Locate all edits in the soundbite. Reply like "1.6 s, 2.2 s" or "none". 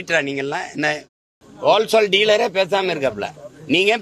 1.1 s